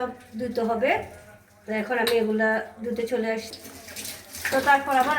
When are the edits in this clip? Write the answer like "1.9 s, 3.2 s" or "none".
3.5 s